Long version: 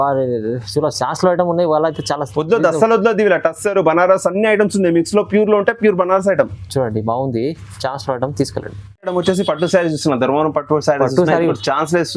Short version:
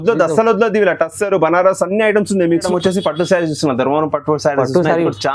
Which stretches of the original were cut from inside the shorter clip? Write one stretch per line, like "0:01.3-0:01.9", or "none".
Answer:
0:05.1-0:09.1